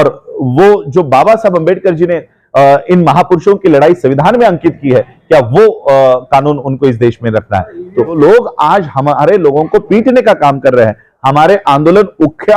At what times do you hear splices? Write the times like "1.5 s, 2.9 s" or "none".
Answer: 8.2 s